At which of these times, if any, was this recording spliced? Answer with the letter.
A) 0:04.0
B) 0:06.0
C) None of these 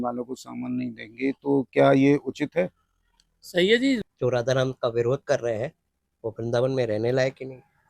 A